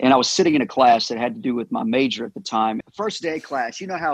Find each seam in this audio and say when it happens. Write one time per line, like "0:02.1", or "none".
0:02.8